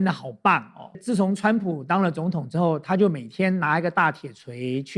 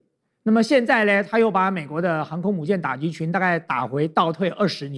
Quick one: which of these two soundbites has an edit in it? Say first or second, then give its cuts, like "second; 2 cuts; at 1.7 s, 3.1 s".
first; 1 cut; at 1.0 s